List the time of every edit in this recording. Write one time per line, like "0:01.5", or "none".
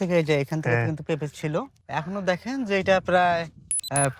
0:01.7